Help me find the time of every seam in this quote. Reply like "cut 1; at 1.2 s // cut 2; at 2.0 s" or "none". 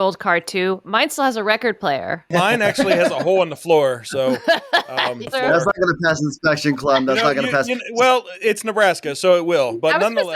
cut 1; at 2.2 s // cut 2; at 5.3 s